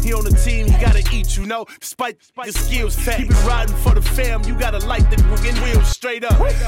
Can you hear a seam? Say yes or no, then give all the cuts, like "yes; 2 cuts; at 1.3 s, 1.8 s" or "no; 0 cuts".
no; 0 cuts